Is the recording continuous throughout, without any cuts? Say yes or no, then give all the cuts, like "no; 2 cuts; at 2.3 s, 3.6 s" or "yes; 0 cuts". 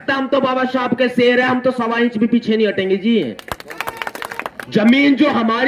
no; 1 cut; at 4.3 s